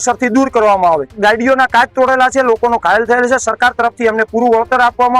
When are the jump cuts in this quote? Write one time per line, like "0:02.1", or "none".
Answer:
0:01.1